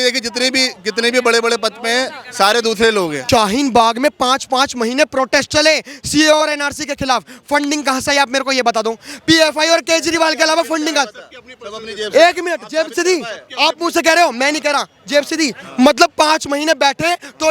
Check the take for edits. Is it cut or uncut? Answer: cut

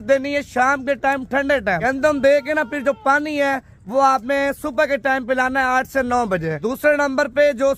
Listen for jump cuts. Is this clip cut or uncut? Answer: cut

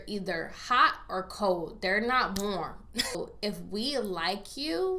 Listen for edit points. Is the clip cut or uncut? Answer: cut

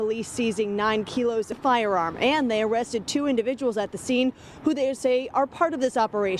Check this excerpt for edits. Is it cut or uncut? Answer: cut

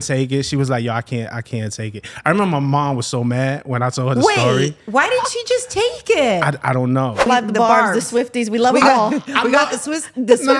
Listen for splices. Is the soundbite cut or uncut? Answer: cut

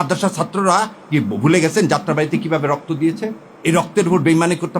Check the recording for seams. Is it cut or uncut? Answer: cut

